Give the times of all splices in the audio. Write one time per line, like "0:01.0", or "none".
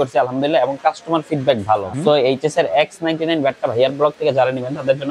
0:01.9